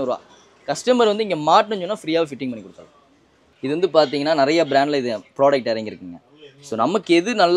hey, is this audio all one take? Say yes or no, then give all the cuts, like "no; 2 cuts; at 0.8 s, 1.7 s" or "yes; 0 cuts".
no; 1 cut; at 3.5 s